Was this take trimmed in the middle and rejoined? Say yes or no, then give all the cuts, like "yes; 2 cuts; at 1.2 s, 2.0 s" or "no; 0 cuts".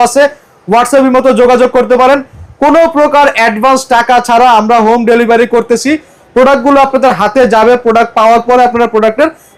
no; 0 cuts